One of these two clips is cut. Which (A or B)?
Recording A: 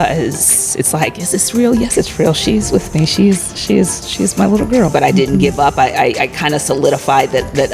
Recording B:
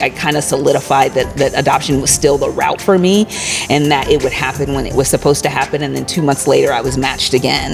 A